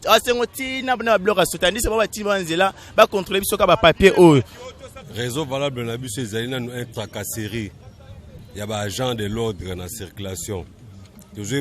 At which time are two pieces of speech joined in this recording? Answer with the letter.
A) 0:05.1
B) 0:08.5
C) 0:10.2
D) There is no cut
A